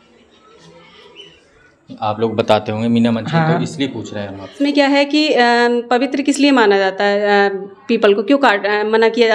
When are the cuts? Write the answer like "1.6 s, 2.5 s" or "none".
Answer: 4.6 s

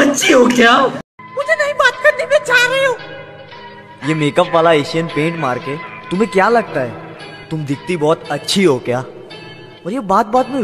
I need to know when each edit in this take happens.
1.1 s

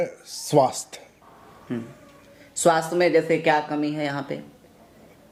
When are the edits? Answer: none

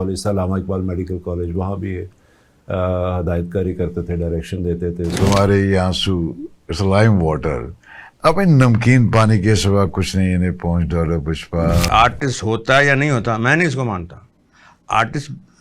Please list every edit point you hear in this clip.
5.2 s, 11.9 s

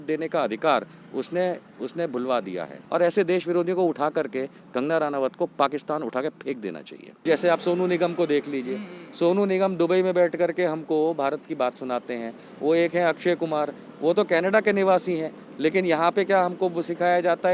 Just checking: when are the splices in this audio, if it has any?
2.8 s, 7.2 s

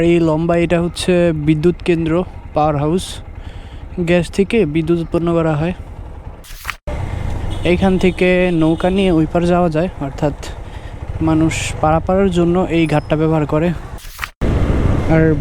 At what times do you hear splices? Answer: 6.9 s, 14.2 s

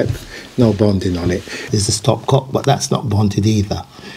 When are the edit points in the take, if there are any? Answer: 1.7 s

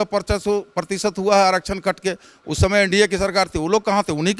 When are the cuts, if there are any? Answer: none

